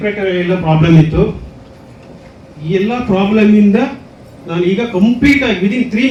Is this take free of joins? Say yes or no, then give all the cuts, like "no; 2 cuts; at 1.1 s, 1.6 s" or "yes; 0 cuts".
yes; 0 cuts